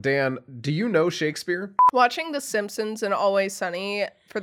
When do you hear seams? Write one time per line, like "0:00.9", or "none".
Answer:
0:01.8